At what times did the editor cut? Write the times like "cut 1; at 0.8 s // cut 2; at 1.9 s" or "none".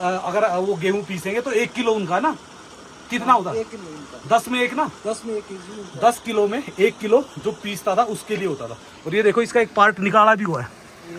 none